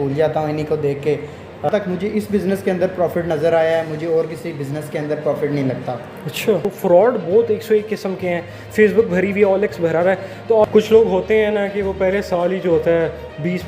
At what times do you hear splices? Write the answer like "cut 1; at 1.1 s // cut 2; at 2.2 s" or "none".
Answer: cut 1; at 1.7 s // cut 2; at 6.7 s // cut 3; at 10.7 s